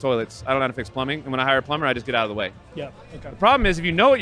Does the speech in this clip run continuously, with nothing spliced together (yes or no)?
yes